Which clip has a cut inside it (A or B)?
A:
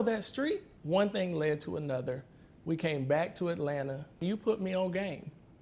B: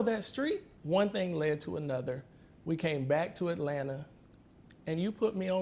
A